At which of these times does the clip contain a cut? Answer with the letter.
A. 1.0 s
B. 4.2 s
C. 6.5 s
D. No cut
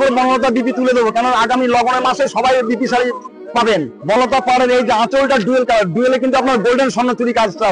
B